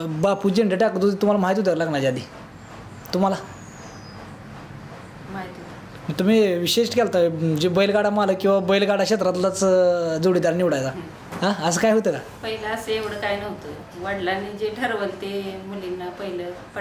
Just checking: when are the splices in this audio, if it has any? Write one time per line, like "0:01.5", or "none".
none